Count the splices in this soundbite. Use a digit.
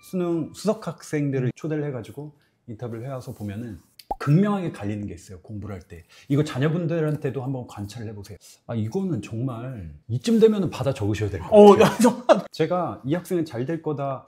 0